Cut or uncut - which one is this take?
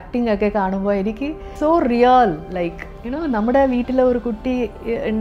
cut